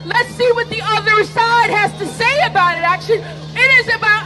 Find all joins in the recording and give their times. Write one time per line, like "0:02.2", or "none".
none

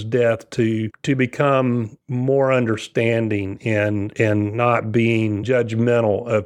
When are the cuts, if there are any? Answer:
none

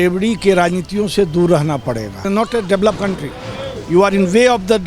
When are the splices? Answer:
0:02.2

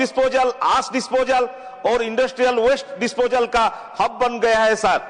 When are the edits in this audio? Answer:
none

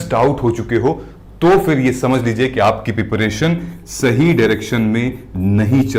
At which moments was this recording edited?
none

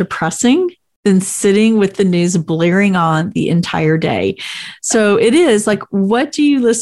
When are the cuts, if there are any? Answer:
none

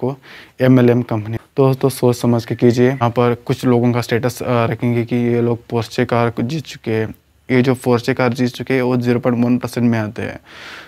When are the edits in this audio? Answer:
0:01.4
0:03.0

